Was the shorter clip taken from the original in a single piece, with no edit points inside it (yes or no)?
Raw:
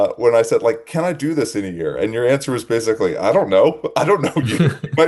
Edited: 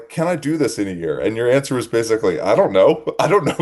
yes